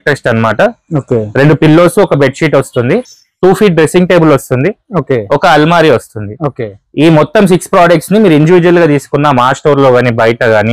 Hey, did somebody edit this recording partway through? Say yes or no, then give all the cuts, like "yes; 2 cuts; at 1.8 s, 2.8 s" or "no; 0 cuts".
no; 0 cuts